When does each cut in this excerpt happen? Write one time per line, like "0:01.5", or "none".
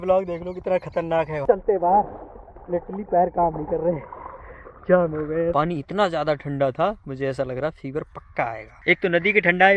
0:01.4
0:05.5
0:08.8

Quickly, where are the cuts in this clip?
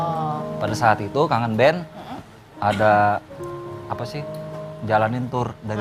0:03.6

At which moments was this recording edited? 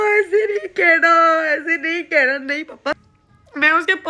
0:02.9

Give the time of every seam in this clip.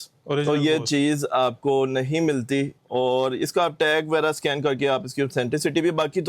0:02.8

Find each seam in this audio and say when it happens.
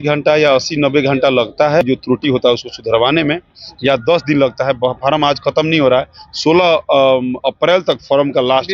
0:01.8

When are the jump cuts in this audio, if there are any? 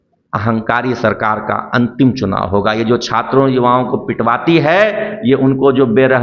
none

